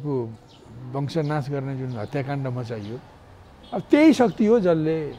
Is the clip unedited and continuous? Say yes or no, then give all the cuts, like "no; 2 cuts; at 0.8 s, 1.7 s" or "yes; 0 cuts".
yes; 0 cuts